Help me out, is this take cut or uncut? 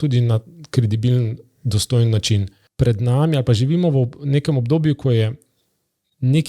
cut